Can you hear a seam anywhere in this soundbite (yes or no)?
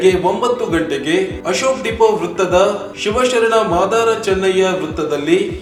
no